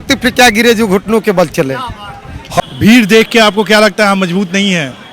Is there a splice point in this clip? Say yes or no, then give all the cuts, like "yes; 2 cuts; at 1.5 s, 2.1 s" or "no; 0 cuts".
yes; 1 cut; at 2.6 s